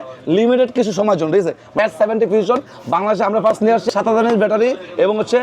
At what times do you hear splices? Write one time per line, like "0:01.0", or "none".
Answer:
0:01.8
0:03.9

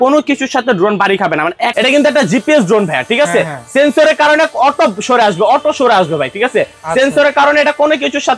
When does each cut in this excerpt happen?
0:01.7

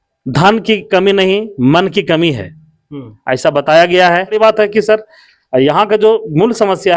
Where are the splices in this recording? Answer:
0:04.3

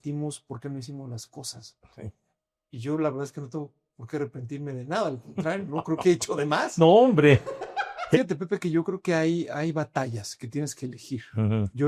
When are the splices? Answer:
0:08.2

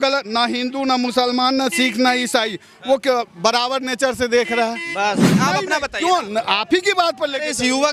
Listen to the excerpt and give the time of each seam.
0:05.3

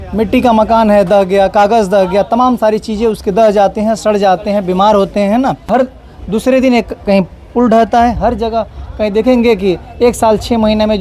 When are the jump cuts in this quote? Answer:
0:05.6

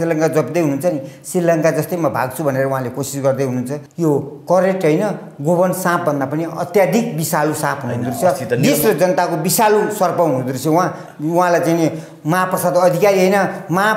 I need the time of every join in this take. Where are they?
0:03.8

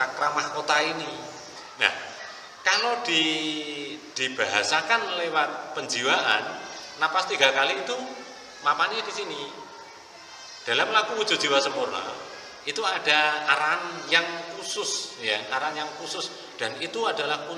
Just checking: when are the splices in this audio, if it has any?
0:01.6

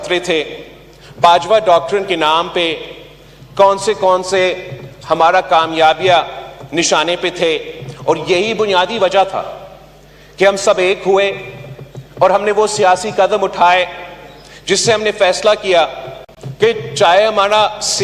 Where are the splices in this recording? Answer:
none

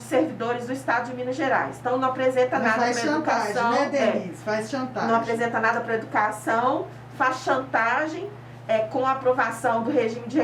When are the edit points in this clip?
none

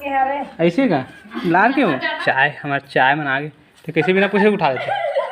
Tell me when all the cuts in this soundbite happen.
0:02.2

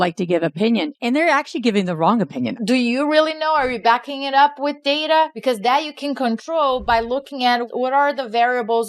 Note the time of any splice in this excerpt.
0:02.5
0:05.4
0:07.7

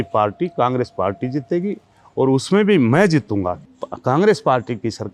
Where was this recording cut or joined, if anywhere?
0:03.6

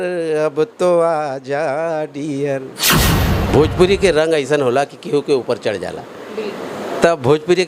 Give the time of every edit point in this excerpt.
0:03.2

